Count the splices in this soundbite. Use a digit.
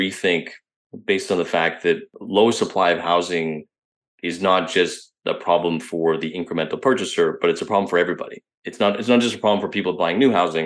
1